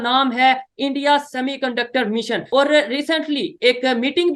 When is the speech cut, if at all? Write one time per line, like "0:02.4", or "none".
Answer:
0:02.4

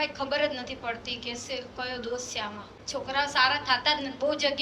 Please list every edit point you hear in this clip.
0:02.7

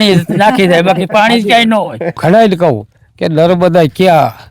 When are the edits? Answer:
0:02.2

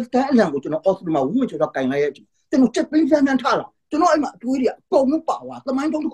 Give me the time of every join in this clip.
none

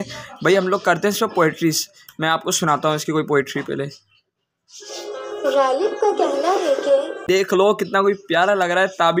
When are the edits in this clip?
0:07.2

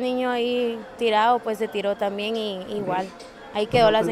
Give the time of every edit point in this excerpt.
none

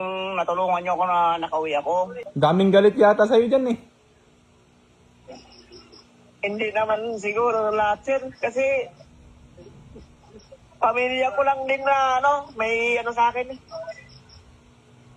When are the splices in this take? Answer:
0:02.2

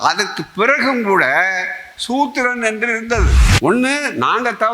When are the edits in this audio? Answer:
0:03.4

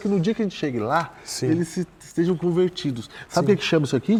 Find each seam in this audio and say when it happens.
none

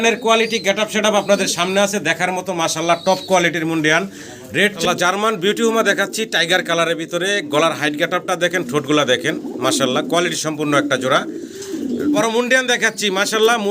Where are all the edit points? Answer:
0:04.8
0:12.2

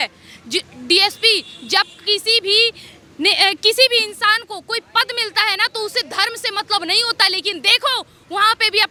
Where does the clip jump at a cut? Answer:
none

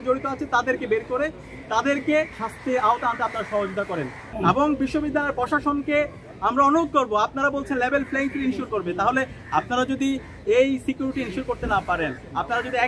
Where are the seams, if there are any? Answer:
0:02.4
0:04.2

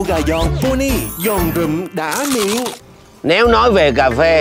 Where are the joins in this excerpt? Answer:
0:02.7

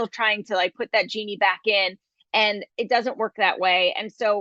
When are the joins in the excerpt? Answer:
none

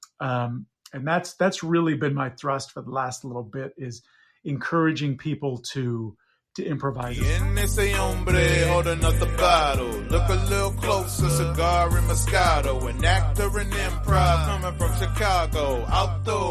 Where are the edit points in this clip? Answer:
0:07.1

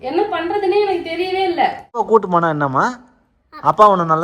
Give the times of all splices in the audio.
0:02.1

